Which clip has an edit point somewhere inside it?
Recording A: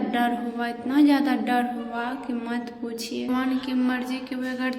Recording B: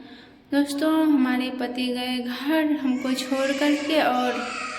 A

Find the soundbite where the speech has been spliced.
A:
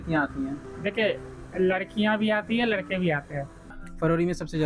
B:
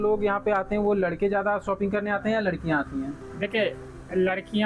A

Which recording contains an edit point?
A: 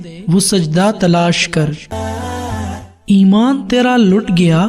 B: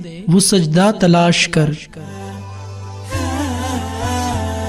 A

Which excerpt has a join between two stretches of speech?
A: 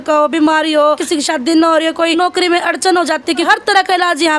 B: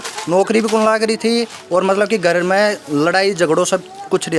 A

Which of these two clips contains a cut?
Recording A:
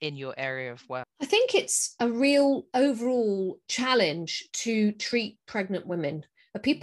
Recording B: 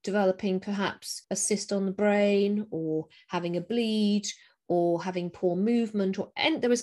A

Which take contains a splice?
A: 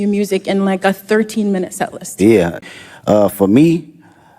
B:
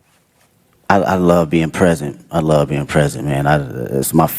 A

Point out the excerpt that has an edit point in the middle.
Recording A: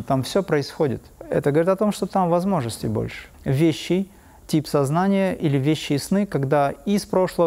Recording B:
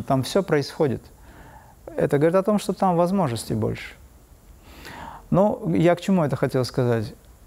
A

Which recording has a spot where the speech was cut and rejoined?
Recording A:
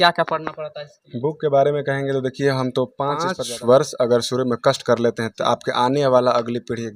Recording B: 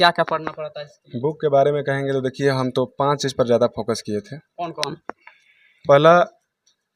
A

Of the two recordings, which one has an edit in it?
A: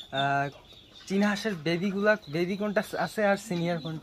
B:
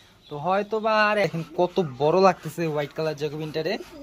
B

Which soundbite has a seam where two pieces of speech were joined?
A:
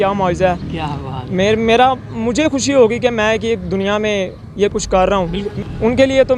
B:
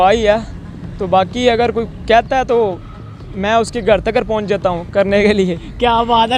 A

